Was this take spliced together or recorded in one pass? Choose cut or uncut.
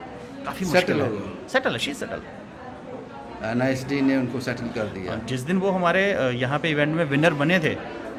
uncut